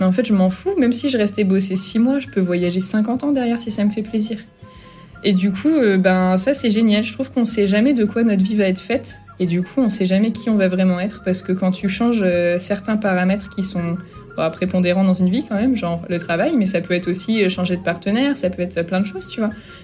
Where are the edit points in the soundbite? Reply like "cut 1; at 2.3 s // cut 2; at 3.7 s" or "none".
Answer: none